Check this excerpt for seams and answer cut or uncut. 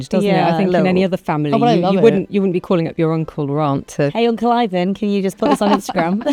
uncut